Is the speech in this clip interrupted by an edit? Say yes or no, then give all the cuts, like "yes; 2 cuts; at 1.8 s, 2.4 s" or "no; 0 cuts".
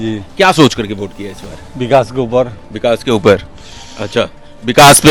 no; 0 cuts